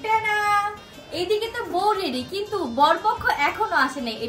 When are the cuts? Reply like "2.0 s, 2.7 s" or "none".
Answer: none